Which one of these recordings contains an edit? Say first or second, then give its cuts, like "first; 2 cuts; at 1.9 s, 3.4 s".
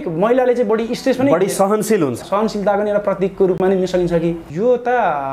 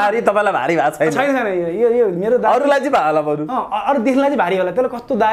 first; 2 cuts; at 2.2 s, 4.4 s